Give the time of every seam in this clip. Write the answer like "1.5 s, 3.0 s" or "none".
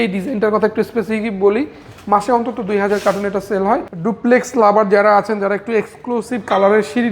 3.9 s